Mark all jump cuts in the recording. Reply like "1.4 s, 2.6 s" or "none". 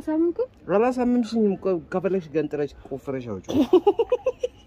none